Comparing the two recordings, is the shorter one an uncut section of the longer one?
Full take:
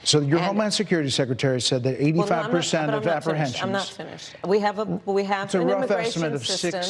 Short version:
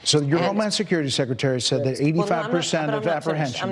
yes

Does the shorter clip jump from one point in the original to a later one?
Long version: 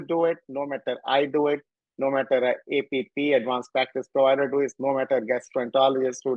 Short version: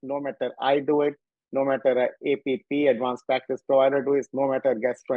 no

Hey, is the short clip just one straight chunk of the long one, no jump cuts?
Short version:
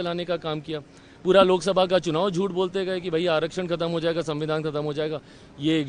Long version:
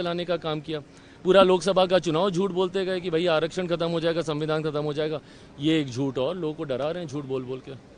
yes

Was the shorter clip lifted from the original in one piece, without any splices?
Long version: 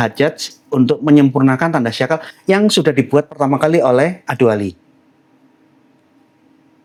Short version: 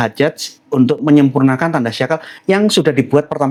yes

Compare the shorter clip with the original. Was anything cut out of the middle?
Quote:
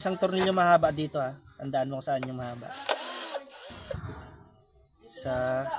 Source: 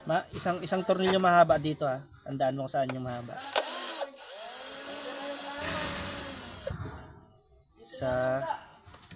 yes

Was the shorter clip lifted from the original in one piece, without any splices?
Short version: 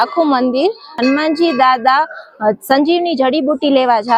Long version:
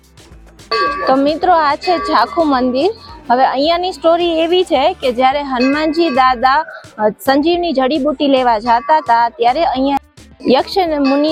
no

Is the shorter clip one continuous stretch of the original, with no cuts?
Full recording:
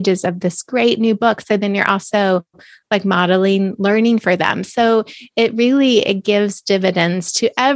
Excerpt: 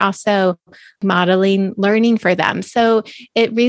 no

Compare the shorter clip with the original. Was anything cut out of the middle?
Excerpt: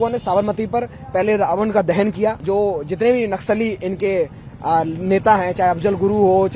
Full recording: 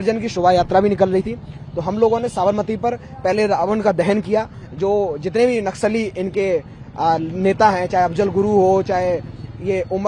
yes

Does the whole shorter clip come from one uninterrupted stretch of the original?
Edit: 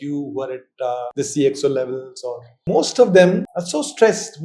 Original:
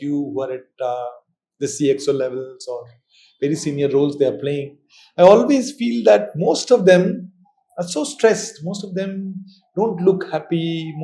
no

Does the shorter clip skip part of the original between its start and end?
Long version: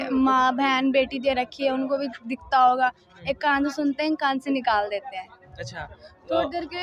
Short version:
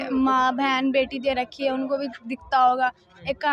no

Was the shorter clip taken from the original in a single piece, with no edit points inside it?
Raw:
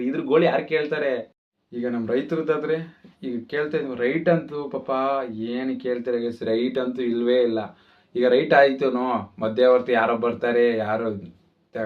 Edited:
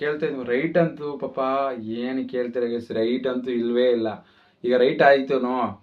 yes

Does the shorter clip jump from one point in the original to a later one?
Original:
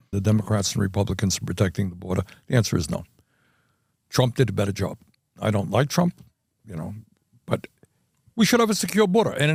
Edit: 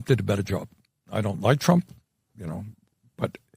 no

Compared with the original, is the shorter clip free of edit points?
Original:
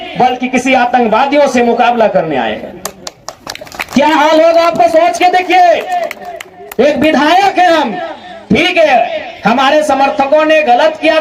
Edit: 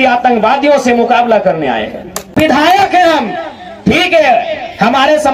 no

